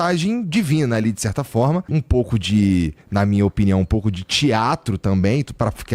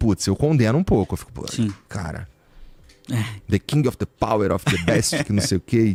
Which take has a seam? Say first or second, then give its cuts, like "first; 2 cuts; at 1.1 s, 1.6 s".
first; 1 cut; at 1.9 s